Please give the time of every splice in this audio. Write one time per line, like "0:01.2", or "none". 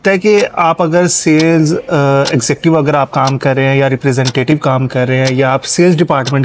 none